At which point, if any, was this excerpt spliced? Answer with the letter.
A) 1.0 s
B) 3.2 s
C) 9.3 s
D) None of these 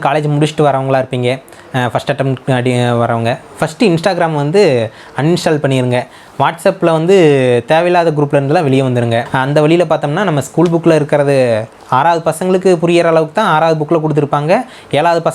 C